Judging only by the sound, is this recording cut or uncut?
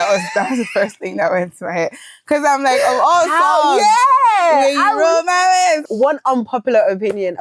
cut